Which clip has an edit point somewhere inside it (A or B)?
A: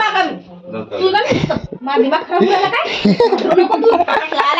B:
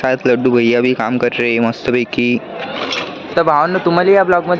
B